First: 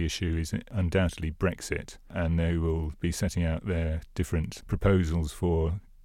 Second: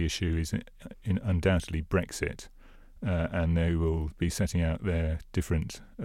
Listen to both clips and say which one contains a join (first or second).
first